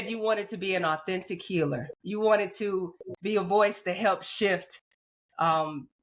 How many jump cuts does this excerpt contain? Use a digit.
1